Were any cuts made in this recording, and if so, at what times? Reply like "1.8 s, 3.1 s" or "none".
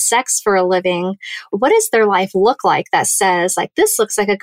1.5 s